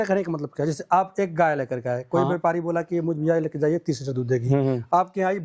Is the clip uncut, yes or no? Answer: yes